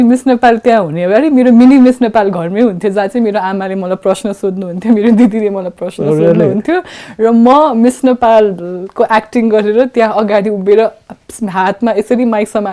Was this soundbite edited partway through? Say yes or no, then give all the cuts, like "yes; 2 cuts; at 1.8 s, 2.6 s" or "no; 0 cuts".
no; 0 cuts